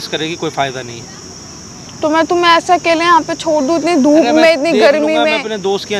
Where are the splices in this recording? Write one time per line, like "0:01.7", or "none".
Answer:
none